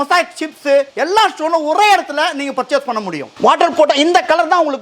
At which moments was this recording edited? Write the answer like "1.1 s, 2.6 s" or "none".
0.9 s, 3.2 s